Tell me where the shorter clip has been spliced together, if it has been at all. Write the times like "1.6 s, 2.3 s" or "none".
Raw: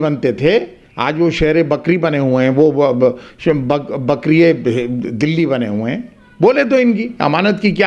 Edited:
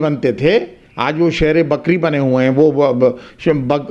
none